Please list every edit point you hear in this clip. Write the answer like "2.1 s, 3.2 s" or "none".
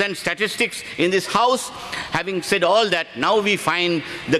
none